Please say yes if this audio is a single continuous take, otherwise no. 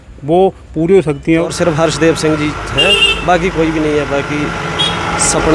no